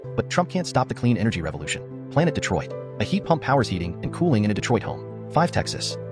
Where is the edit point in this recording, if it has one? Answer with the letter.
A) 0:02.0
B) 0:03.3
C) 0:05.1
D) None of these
C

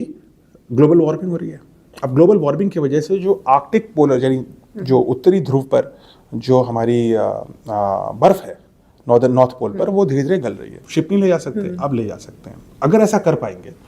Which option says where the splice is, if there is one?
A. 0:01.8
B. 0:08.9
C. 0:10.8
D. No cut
C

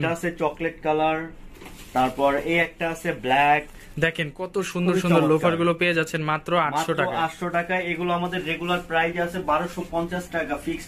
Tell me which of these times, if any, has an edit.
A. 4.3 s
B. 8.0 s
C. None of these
C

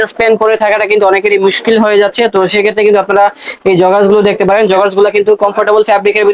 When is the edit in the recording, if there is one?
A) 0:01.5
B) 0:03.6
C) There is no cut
C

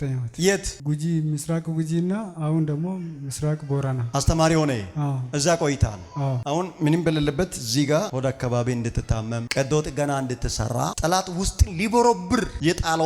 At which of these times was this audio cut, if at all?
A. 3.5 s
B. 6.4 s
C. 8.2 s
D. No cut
B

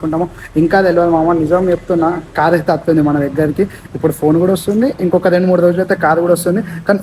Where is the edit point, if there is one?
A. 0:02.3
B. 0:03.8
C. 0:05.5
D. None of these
D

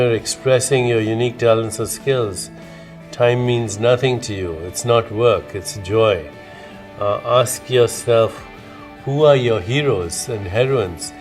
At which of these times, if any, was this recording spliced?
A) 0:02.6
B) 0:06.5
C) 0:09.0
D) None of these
B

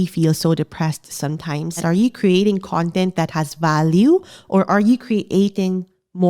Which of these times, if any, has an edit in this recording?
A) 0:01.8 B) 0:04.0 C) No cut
A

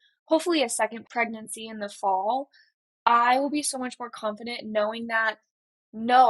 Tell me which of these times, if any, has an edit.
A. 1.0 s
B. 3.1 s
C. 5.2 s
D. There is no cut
A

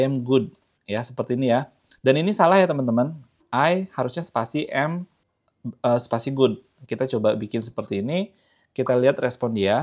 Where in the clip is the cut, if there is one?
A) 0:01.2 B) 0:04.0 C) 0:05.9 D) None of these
D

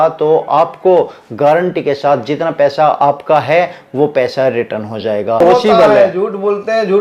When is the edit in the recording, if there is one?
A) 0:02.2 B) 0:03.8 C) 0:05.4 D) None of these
C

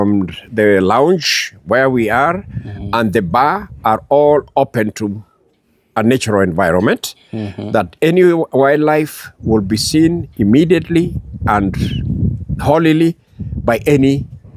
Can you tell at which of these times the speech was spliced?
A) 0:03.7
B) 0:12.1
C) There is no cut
C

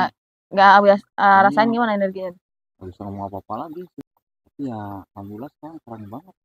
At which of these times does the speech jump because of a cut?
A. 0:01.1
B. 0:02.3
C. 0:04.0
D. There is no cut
C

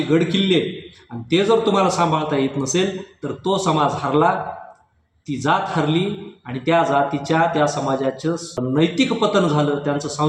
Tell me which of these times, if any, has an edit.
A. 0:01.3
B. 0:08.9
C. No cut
B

